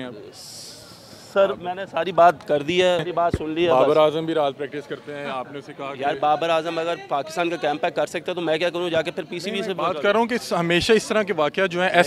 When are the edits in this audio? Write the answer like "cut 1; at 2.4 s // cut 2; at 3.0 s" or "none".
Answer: cut 1; at 3.1 s